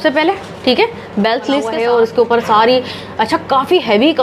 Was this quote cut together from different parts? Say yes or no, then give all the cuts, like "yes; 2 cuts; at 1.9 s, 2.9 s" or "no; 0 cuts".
yes; 1 cut; at 1.7 s